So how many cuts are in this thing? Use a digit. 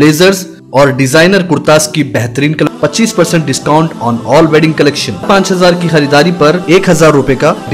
2